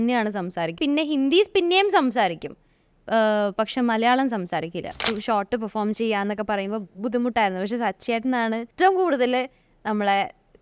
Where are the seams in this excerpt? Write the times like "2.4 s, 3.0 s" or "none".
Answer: 0.8 s, 5.1 s, 8.7 s